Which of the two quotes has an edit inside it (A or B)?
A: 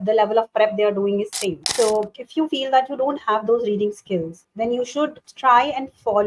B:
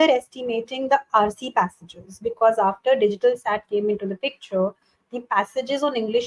A